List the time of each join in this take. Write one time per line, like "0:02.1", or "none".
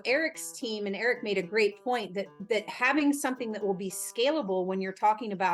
none